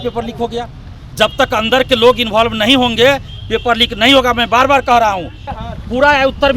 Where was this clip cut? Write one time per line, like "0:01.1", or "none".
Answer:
0:05.6